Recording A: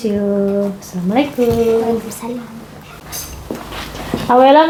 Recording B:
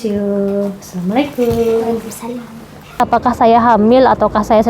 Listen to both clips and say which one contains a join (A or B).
B